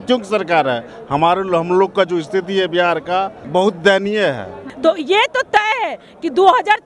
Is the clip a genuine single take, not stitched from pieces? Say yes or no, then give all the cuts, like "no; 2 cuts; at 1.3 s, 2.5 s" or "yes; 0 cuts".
no; 2 cuts; at 3.4 s, 4.7 s